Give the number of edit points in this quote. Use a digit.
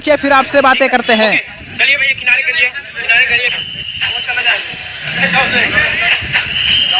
1